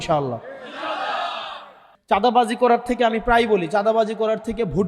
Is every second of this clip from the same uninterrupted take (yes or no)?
no